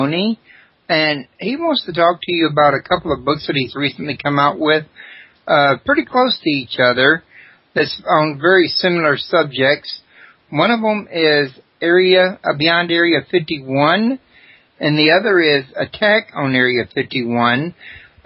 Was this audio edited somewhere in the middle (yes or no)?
yes